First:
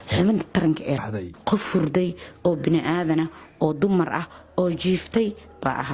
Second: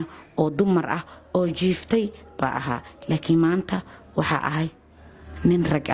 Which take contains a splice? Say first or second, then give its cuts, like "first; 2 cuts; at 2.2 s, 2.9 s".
first; 1 cut; at 1.0 s